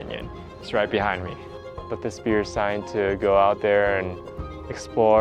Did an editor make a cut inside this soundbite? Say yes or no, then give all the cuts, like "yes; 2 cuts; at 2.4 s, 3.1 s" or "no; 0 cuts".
yes; 1 cut; at 1.5 s